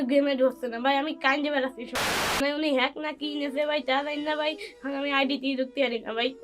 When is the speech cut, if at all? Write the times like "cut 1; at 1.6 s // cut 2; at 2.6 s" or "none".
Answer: cut 1; at 2.0 s